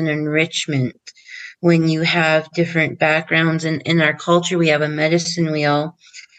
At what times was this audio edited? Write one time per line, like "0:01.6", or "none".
none

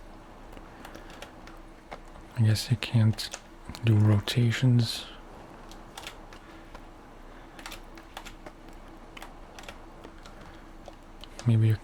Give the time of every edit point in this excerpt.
none

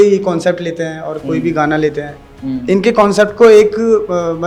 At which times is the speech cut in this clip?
none

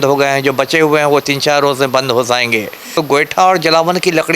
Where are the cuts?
0:02.9

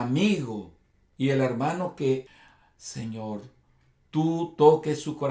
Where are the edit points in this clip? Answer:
0:02.3

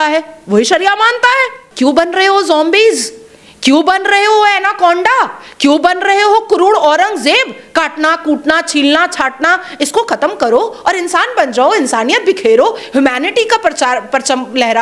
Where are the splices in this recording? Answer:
0:01.6

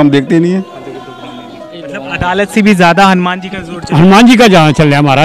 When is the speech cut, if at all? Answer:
0:01.4

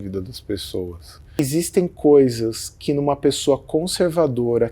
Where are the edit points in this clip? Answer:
0:01.4

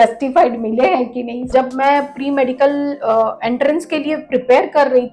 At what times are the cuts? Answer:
0:01.5

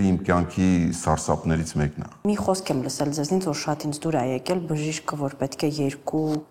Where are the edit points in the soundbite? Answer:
0:02.2

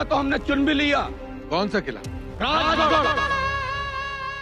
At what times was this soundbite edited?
0:03.1

